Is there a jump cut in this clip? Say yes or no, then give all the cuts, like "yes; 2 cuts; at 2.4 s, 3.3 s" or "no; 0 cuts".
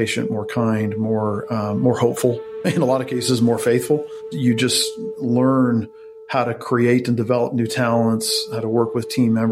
no; 0 cuts